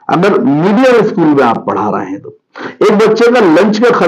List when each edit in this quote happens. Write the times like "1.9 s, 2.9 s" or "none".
none